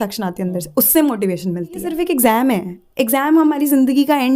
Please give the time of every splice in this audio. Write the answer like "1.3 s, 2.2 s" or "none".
1.9 s